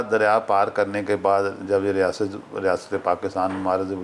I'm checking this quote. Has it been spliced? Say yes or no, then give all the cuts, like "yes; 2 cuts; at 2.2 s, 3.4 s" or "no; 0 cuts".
no; 0 cuts